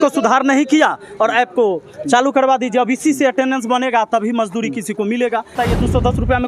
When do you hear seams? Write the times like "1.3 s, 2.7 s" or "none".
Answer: 5.5 s